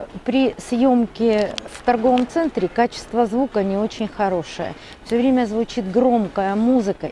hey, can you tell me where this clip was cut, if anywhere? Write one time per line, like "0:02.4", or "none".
0:01.7